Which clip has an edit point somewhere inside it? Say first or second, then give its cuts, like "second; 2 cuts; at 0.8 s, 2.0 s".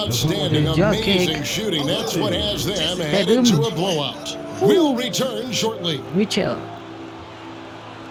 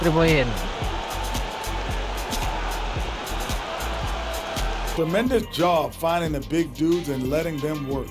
second; 1 cut; at 4.9 s